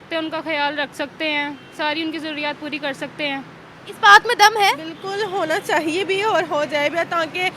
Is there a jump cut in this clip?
yes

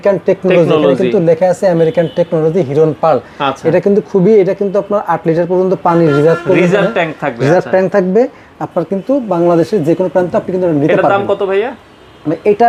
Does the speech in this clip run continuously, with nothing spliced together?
yes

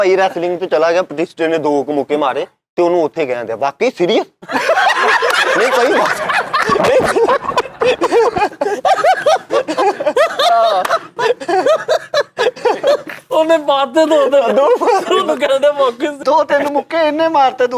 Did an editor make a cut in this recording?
no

